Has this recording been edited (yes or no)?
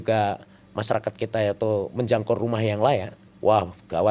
yes